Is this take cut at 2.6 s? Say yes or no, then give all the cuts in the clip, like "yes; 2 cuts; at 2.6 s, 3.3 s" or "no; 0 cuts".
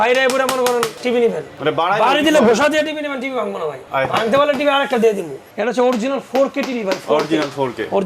no; 3 cuts; at 1.3 s, 3.8 s, 5.4 s